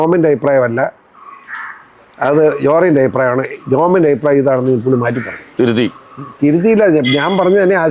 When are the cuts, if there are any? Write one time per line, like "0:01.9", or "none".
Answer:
none